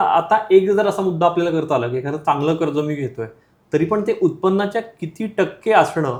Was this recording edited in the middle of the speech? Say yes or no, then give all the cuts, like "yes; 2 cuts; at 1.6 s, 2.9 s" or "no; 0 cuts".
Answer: no; 0 cuts